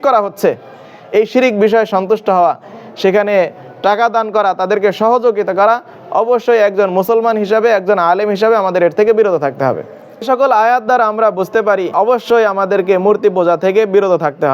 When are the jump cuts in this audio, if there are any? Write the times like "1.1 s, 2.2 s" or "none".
10.3 s, 11.9 s